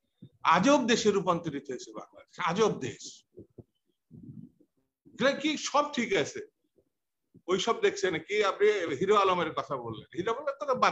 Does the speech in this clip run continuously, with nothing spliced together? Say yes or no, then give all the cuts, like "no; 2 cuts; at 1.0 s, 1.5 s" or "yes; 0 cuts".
yes; 0 cuts